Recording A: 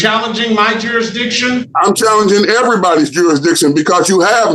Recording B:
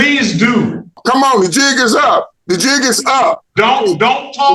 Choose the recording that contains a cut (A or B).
B